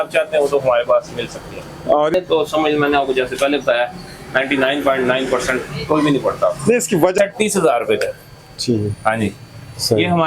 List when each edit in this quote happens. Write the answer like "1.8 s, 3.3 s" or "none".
2.1 s, 7.1 s